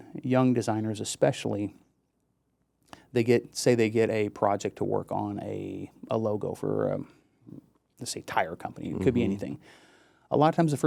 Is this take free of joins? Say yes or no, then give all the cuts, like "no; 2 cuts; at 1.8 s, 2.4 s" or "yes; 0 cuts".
yes; 0 cuts